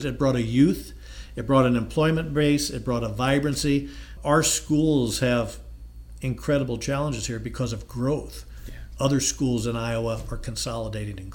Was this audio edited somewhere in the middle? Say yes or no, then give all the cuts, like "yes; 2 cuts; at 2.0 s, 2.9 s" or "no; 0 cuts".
no; 0 cuts